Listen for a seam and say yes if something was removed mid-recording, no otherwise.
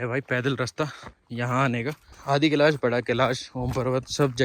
yes